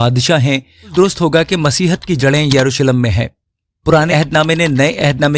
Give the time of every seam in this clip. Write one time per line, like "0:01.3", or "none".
0:00.9
0:04.1